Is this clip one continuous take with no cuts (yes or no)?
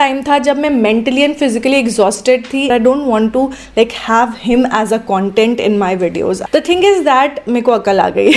no